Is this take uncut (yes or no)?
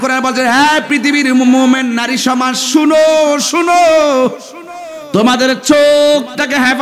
yes